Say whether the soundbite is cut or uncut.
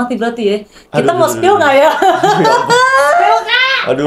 uncut